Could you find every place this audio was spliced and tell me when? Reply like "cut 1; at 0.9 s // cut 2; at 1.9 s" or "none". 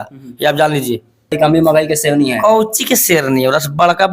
cut 1; at 1.4 s